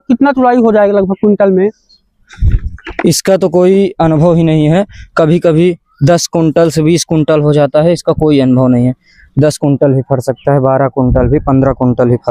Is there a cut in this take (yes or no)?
no